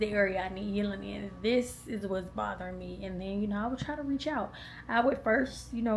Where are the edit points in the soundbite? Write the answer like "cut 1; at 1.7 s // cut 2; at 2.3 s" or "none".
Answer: none